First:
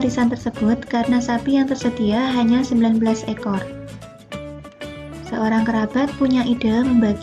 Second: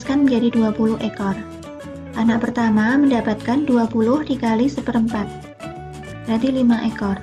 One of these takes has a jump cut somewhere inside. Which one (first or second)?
first